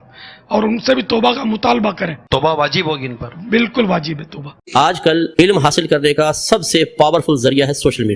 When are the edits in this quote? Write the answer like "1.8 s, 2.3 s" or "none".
4.6 s